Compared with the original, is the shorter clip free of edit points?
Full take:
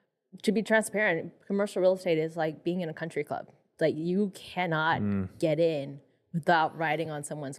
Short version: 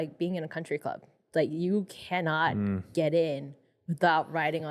yes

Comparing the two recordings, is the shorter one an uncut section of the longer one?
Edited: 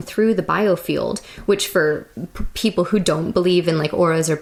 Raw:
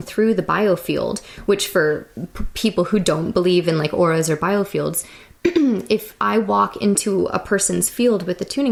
yes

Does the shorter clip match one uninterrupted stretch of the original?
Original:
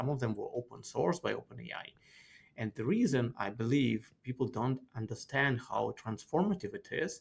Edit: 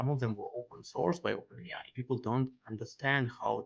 no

